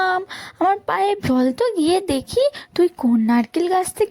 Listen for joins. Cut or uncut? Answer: cut